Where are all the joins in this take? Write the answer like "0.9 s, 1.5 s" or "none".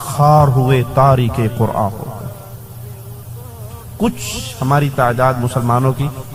none